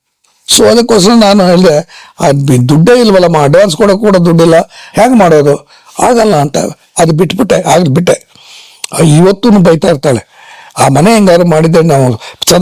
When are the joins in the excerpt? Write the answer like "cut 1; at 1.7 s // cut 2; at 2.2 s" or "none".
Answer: cut 1; at 4.8 s